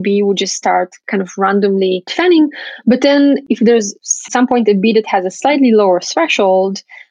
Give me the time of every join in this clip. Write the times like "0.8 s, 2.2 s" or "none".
2.1 s, 3.5 s